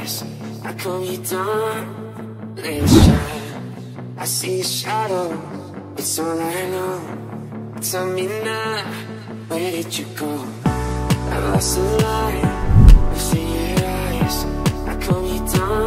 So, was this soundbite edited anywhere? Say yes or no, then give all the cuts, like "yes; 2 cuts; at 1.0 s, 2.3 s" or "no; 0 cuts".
no; 0 cuts